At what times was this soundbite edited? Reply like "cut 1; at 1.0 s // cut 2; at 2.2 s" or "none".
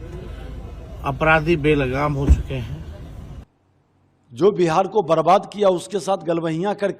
cut 1; at 3.4 s